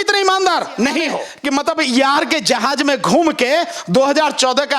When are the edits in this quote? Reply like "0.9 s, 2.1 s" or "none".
1.2 s

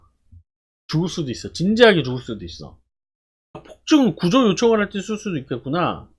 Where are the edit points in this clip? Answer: 3.7 s

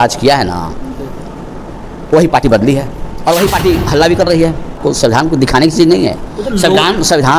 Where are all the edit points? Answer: 4.8 s

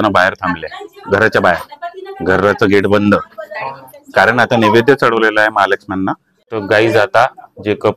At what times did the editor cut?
6.3 s

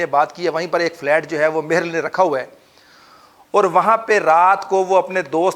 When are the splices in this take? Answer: none

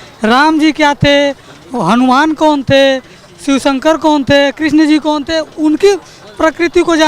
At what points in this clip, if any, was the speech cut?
none

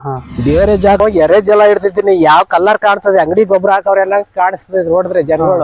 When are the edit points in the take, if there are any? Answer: 1.0 s

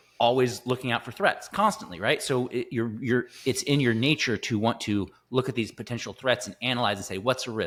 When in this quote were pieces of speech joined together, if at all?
none

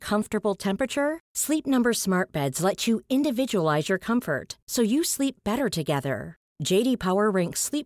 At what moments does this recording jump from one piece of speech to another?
none

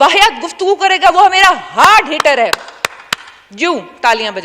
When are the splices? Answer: none

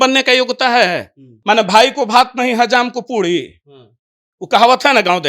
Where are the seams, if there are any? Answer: 1.3 s

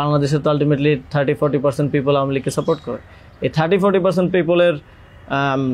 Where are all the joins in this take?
none

